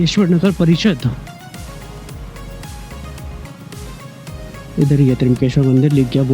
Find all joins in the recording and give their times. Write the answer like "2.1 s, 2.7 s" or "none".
none